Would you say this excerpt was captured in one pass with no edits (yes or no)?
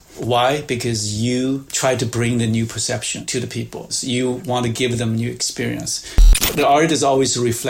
no